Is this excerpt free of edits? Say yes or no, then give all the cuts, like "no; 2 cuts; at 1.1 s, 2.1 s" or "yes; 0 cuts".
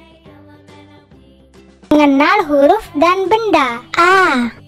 no; 1 cut; at 1.9 s